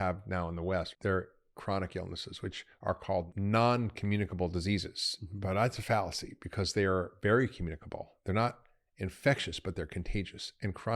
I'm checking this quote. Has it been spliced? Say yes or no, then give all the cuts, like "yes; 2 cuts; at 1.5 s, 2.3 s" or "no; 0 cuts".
yes; 2 cuts; at 0.9 s, 3.3 s